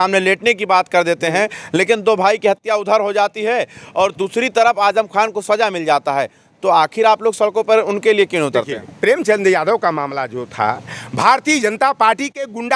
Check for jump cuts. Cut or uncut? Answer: uncut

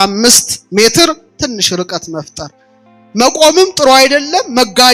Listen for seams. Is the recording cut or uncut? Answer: uncut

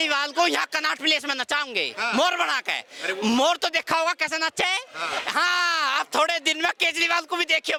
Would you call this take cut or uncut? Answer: uncut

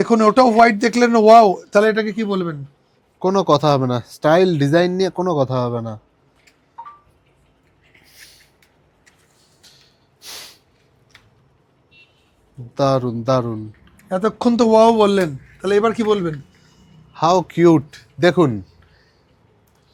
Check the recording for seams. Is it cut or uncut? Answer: uncut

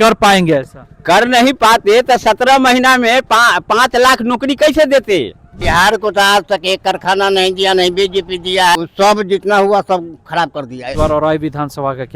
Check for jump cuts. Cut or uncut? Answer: cut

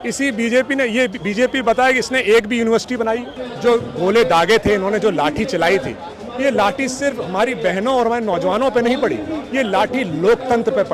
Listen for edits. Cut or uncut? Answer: cut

